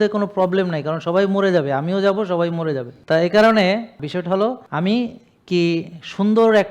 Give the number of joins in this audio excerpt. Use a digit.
2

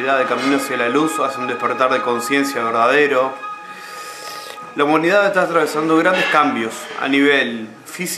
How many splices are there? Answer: 0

